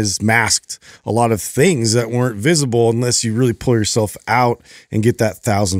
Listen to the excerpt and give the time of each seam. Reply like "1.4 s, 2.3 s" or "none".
none

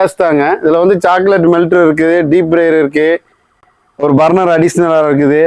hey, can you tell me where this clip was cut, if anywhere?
none

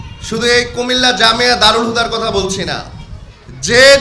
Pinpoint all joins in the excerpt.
none

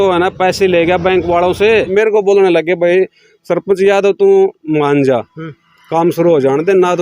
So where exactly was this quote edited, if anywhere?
1.9 s

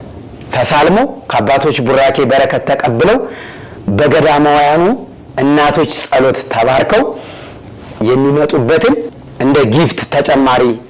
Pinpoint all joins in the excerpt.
none

